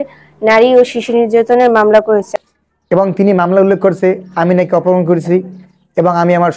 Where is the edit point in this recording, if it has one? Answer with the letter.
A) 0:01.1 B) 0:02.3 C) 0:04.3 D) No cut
B